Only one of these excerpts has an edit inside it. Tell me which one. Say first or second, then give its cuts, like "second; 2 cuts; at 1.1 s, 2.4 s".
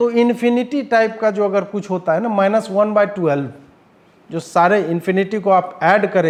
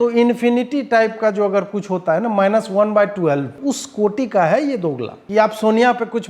second; 2 cuts; at 3.5 s, 5.1 s